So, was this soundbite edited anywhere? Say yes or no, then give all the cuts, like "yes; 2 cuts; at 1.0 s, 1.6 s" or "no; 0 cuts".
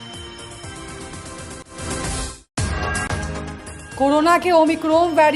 no; 0 cuts